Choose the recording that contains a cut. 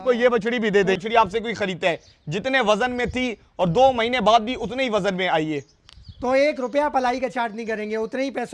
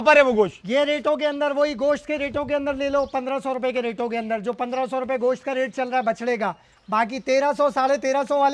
first; 1 cut; at 1.0 s

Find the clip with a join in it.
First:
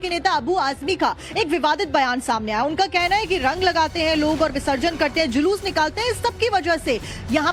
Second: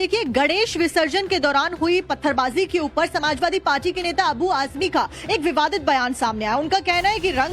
second; 1 cut; at 1.8 s

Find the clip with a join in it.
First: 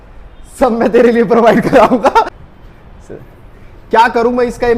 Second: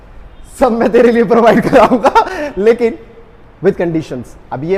first; 1 cut; at 2.3 s

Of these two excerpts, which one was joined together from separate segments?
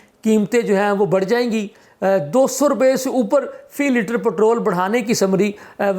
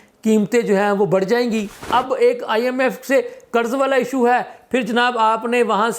second; 1 cut; at 1.9 s

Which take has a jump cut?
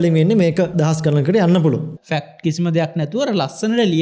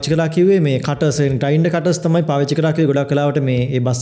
first; 2 cuts; at 0.7 s, 1.9 s

